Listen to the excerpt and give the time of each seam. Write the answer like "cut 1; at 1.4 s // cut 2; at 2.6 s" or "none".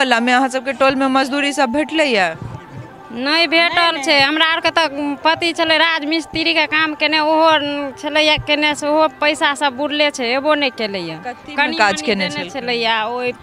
none